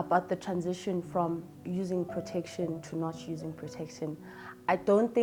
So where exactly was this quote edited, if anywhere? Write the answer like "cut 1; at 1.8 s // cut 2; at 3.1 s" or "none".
none